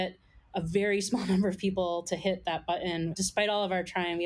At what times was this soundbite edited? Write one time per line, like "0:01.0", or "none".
0:03.1